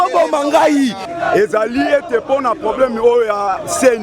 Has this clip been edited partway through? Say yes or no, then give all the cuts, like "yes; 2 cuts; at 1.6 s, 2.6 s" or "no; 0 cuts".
yes; 1 cut; at 1.1 s